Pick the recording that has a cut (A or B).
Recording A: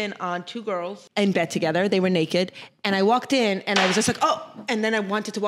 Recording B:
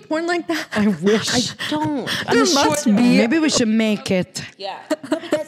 A